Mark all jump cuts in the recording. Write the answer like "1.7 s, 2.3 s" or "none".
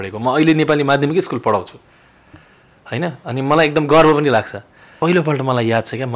4.9 s